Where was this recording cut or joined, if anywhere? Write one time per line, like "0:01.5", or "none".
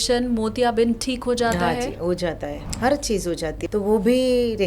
0:02.6
0:03.6